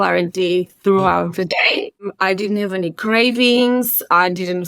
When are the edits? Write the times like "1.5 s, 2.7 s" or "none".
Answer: 2.0 s

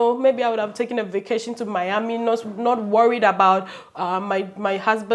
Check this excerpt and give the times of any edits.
none

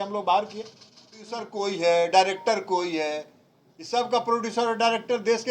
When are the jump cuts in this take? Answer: 1.4 s

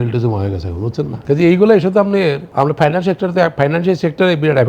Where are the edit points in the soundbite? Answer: 1.2 s, 2.4 s

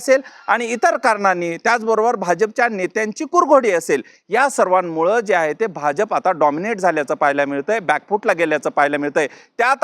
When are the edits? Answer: none

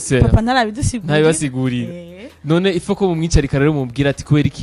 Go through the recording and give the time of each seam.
none

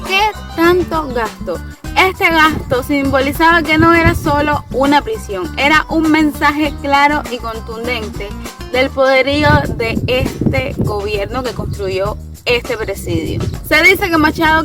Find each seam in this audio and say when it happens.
none

